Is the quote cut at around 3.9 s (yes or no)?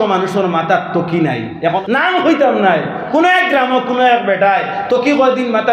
no